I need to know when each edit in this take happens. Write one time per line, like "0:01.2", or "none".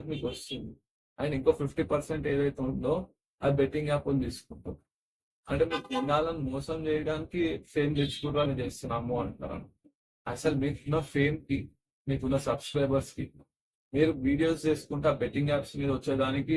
0:08.5